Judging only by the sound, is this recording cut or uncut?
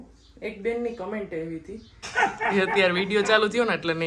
cut